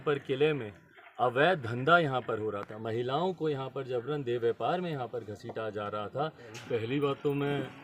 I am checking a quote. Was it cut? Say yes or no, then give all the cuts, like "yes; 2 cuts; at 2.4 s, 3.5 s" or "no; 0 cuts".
yes; 1 cut; at 6.5 s